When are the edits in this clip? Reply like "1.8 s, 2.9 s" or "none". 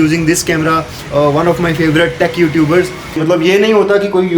0.9 s, 3.2 s